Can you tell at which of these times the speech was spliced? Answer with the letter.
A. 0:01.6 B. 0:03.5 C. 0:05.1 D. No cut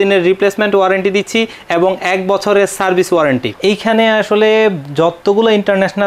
B